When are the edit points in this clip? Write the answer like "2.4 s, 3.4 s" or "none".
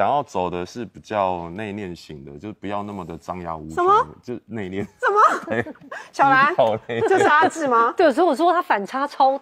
none